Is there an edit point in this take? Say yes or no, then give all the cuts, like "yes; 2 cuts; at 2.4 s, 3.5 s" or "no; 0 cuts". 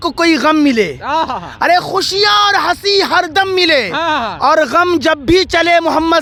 no; 0 cuts